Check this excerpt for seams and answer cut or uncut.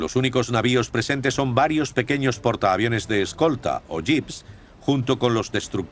cut